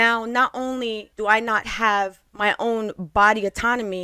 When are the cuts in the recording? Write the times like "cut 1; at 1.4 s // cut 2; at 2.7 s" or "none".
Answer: cut 1; at 1.1 s // cut 2; at 2.2 s